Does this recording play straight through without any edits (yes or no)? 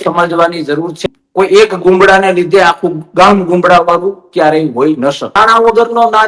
no